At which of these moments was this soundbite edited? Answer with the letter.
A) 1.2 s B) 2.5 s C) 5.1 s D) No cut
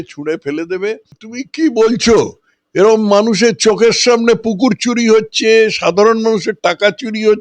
A